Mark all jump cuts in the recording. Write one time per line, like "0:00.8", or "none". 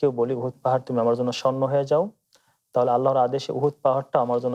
none